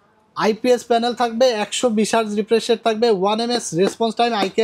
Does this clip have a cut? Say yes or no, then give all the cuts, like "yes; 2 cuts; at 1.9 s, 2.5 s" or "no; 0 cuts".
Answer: no; 0 cuts